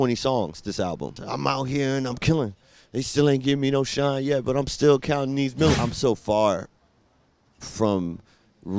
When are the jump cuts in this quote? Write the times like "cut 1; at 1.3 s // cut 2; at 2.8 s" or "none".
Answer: cut 1; at 1.2 s // cut 2; at 5.8 s